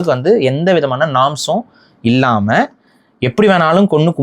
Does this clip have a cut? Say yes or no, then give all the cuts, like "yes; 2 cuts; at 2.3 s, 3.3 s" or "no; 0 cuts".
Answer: no; 0 cuts